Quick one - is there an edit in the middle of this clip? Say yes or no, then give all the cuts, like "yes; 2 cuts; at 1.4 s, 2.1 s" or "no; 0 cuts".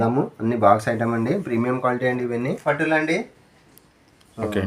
yes; 1 cut; at 2.6 s